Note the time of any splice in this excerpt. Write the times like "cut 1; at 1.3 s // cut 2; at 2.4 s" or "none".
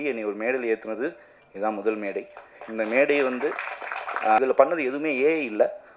cut 1; at 4.4 s